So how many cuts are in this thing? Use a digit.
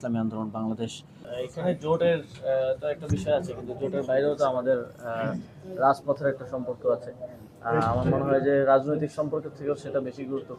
1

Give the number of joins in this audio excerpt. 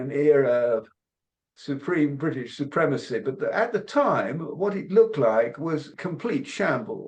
1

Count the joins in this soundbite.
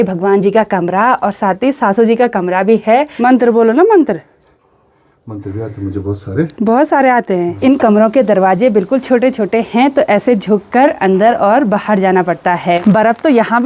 3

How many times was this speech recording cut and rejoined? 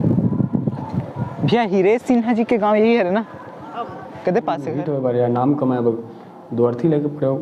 1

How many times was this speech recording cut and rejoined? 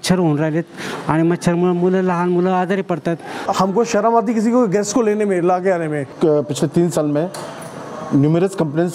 2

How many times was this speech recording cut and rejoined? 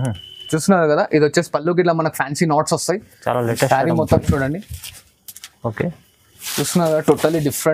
0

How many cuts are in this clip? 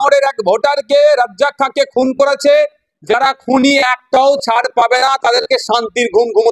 0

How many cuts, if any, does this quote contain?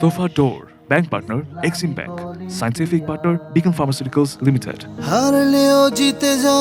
1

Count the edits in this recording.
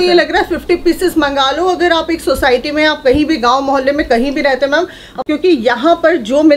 1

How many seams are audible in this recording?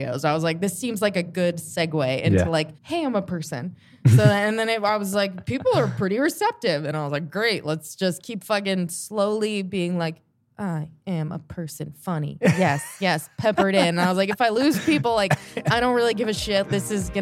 0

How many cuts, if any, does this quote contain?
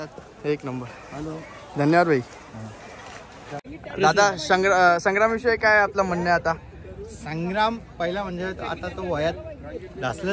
1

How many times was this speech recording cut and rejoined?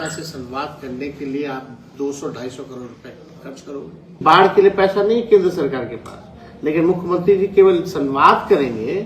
1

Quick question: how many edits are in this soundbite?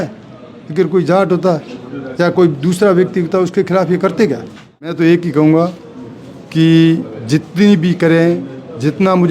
1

